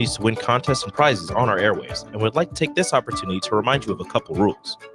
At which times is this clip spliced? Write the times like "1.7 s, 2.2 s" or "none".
none